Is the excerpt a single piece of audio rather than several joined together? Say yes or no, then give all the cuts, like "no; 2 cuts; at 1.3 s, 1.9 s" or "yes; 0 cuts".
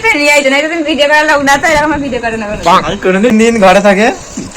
no; 1 cut; at 3.3 s